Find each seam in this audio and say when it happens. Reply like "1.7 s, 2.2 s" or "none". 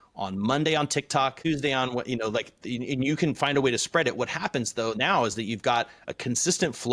1.4 s